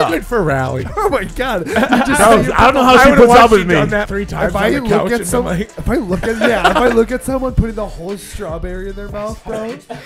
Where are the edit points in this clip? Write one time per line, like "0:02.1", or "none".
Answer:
0:04.1